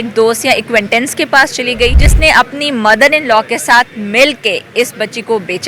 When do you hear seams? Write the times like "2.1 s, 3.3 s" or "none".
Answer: 2.1 s